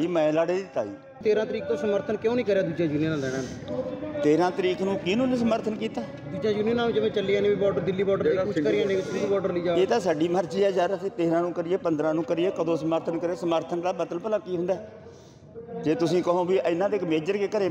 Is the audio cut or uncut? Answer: cut